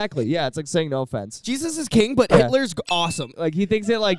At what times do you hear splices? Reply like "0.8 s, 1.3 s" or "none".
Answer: 3.3 s